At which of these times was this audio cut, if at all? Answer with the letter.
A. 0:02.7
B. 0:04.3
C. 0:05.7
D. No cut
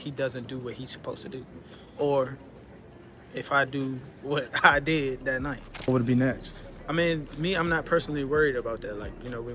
C